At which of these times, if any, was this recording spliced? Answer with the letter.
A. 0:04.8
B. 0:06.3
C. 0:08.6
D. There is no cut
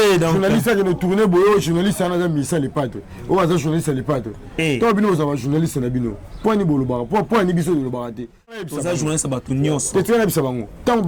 C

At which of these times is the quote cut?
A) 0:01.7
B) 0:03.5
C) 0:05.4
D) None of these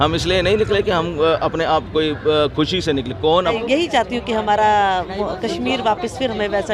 B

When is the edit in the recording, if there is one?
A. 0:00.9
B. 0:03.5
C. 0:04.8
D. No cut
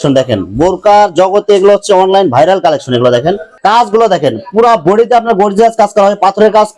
B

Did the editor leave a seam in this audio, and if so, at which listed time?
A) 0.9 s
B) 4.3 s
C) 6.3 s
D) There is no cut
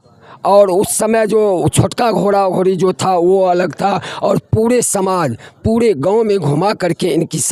D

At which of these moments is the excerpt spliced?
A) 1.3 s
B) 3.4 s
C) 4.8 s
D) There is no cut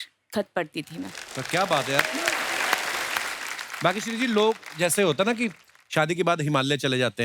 B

